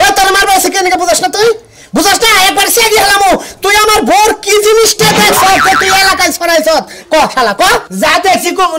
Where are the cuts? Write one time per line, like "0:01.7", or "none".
none

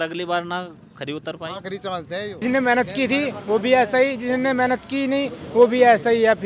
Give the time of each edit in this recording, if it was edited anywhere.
0:02.4

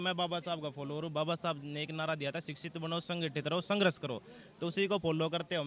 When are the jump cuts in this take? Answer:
none

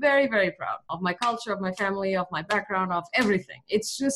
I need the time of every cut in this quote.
0:00.9

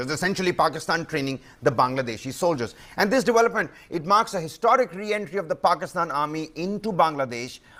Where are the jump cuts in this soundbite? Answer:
none

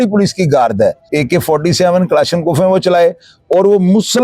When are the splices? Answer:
0:01.0

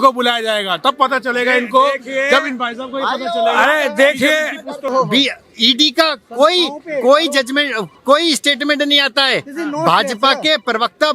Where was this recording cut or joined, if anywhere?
0:04.9

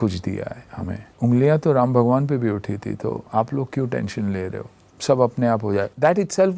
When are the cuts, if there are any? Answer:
0:01.1

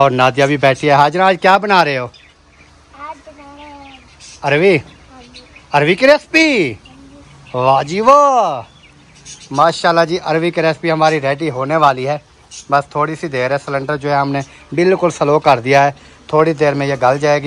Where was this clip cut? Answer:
none

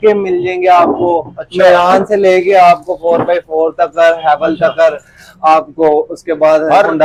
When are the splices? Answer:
none

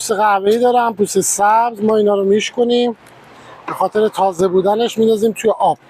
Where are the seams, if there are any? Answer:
none

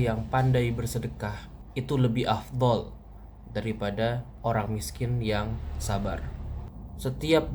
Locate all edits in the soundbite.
0:06.6

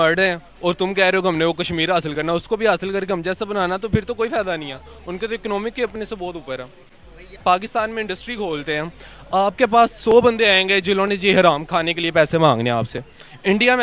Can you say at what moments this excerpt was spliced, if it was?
0:07.4

